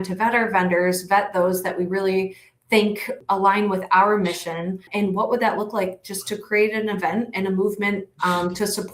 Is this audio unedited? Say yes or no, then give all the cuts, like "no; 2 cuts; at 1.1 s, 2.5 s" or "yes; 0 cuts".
no; 2 cuts; at 3.1 s, 4.8 s